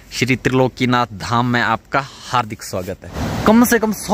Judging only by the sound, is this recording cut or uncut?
cut